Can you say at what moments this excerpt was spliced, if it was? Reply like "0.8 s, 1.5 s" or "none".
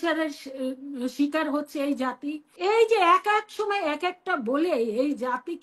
2.4 s